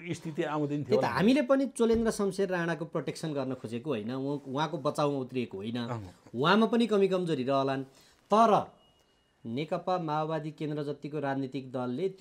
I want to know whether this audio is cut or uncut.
uncut